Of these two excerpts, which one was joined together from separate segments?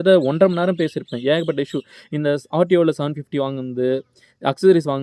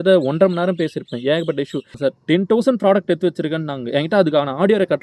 second; 1 cut; at 1.9 s

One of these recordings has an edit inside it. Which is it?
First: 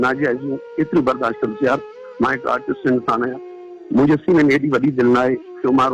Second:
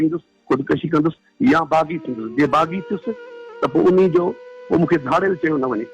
second; 1 cut; at 1.3 s

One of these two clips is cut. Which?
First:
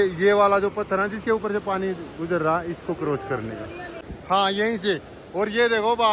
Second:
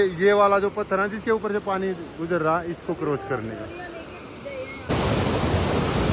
first; 1 cut; at 4.1 s

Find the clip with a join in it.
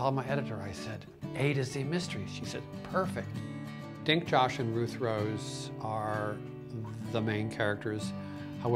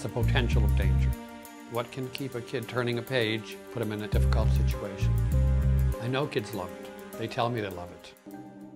second; 1 cut; at 1.4 s

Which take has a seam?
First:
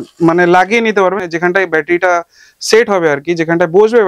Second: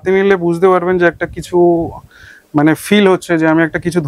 first; 1 cut; at 1.2 s

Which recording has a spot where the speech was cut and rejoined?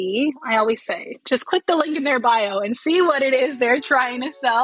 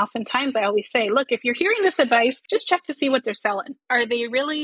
second; 1 cut; at 2.4 s

